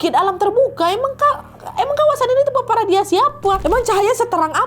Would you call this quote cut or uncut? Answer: cut